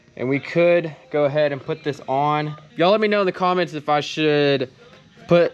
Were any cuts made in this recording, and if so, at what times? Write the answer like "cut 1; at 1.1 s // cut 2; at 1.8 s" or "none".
cut 1; at 2.6 s